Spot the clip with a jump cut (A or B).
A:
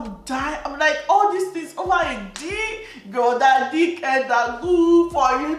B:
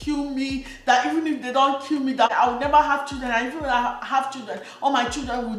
B